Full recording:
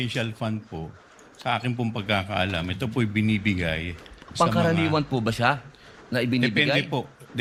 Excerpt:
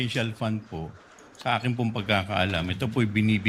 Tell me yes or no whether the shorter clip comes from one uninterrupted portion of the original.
yes